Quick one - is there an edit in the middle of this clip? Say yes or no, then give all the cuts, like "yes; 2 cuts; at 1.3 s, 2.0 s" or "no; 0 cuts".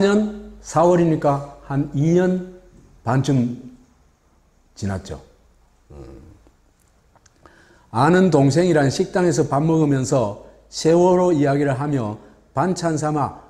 yes; 1 cut; at 2.2 s